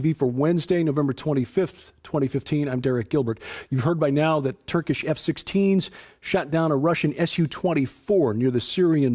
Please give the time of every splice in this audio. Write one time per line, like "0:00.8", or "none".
0:01.6